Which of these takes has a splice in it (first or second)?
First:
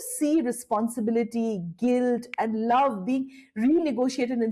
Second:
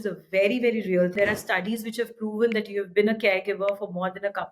second